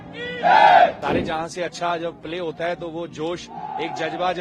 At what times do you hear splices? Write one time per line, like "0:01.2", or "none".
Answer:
0:01.0